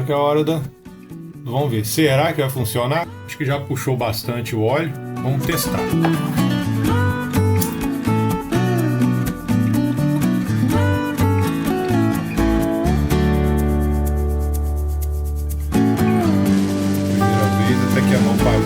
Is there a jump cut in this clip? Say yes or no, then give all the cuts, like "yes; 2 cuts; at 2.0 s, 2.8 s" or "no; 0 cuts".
yes; 1 cut; at 3.2 s